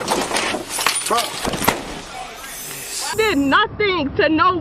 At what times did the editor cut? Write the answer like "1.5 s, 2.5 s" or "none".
3.1 s

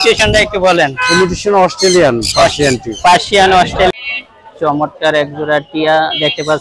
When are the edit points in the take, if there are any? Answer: 3.9 s

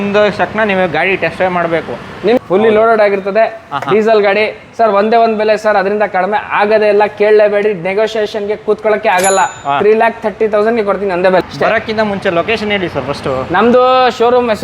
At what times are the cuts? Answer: 2.4 s, 11.4 s

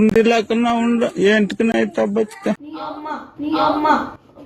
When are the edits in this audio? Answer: 2.7 s

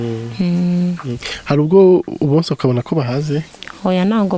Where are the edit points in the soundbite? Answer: none

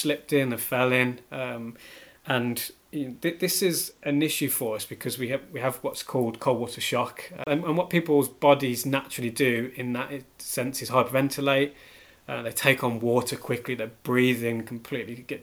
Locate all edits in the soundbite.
7.5 s

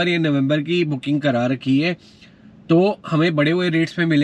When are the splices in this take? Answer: none

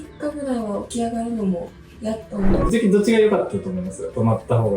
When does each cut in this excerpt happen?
2.5 s

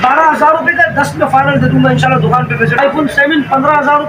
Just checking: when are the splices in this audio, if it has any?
2.8 s

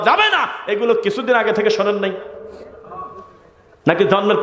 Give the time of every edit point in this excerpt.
none

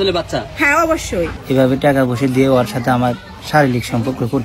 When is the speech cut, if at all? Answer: 1.4 s

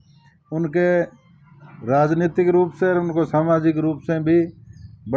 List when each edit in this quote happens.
none

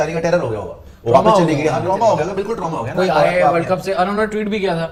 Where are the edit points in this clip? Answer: none

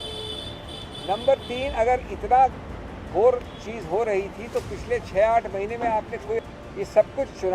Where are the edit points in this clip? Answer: 6.4 s

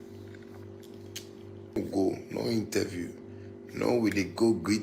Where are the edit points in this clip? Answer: 1.8 s

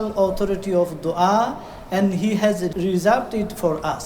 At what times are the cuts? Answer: 2.7 s

